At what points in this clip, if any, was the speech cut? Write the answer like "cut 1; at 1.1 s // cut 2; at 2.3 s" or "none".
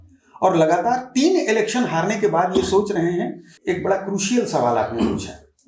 cut 1; at 3.5 s